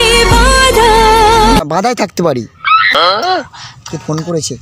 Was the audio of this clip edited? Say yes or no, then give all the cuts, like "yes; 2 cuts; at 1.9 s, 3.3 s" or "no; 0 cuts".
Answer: yes; 1 cut; at 2.9 s